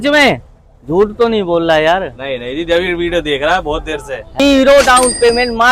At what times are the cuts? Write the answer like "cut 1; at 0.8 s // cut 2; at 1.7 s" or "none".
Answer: cut 1; at 4.2 s

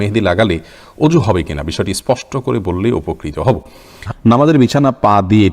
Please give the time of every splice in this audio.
cut 1; at 4.1 s

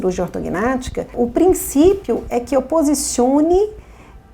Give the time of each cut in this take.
cut 1; at 1.1 s

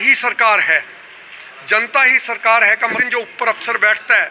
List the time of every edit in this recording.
cut 1; at 3.0 s

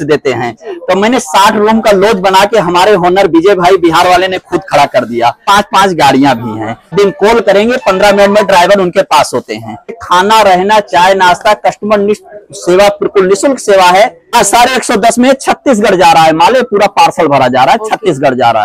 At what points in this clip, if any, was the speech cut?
cut 1; at 5.4 s // cut 2; at 6.9 s // cut 3; at 10.0 s // cut 4; at 14.3 s

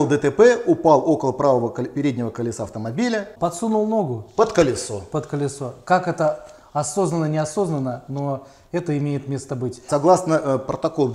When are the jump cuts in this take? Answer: cut 1; at 3.3 s // cut 2; at 9.8 s

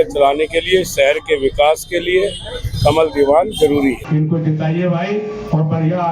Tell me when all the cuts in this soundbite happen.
cut 1; at 4.0 s

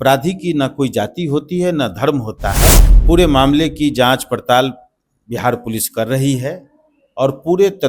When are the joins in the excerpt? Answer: cut 1; at 2.9 s

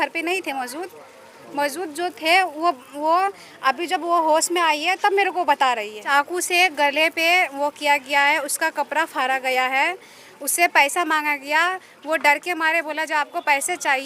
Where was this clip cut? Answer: cut 1; at 6.1 s

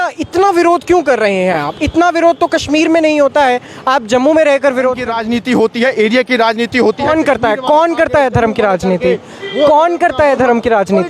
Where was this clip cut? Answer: cut 1; at 5.1 s

